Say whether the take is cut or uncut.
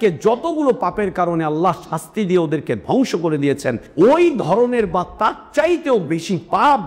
cut